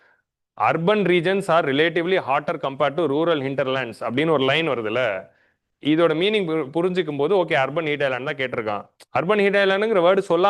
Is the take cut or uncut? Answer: uncut